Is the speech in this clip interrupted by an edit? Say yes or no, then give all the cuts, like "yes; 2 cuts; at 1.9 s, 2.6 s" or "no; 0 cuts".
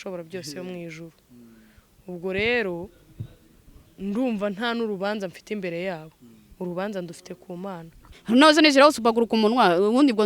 yes; 1 cut; at 8.2 s